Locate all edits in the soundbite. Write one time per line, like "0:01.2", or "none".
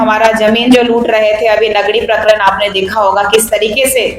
none

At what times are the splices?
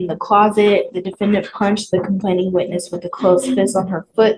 none

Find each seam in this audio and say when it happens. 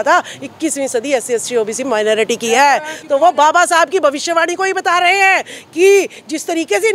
none

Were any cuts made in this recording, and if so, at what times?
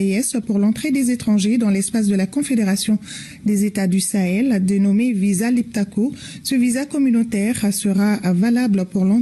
none

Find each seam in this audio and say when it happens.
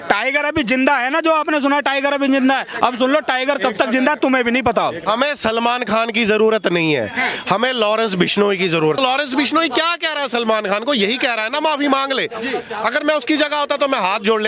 0:05.0
0:09.0

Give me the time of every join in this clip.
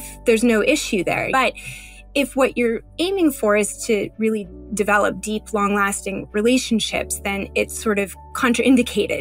0:01.3

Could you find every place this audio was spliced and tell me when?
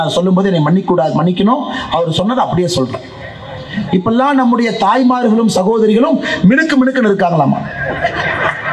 none

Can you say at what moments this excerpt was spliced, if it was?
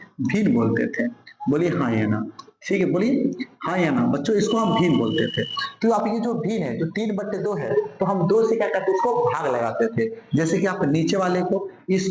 none

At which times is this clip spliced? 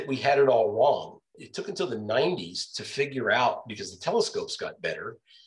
0:01.4

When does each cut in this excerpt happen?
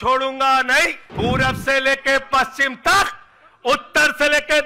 0:01.0

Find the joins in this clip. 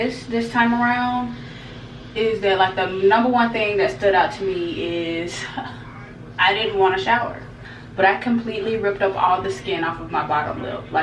0:07.5

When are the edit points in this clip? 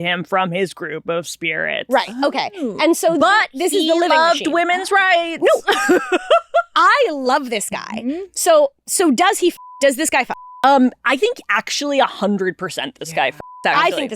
0:10.4

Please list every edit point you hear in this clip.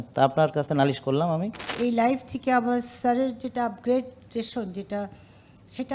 0:01.7

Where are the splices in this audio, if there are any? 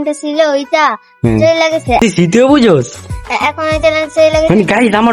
0:02.0

